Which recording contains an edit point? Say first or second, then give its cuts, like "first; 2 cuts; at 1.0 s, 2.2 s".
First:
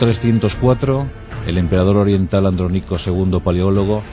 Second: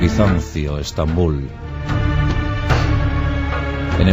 second; 1 cut; at 1.5 s